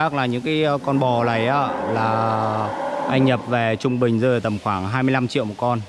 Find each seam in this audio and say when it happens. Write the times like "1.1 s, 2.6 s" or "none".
none